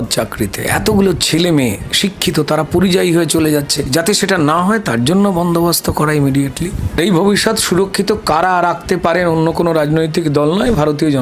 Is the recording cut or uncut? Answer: cut